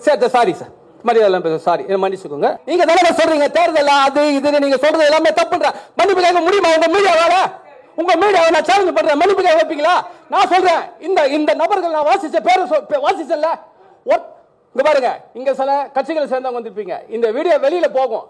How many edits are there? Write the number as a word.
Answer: one